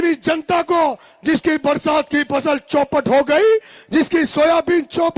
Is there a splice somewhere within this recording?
no; 0 cuts

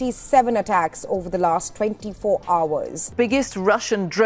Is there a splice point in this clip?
yes; 1 cut; at 3.0 s

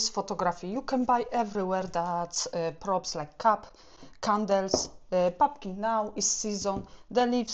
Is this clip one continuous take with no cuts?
yes; 0 cuts

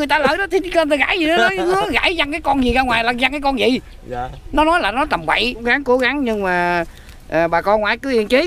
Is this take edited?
yes; 1 cut; at 5.6 s

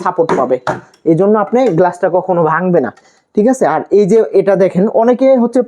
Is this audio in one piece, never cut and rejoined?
yes; 0 cuts

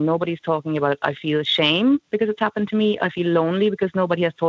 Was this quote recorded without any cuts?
yes; 0 cuts

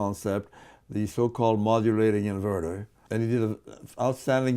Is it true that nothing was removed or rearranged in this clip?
no; 1 cut; at 2.9 s

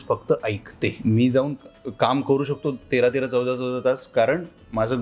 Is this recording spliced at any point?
yes; 1 cut; at 1.0 s

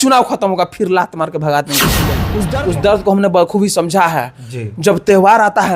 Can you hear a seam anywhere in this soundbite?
yes; 1 cut; at 2.2 s

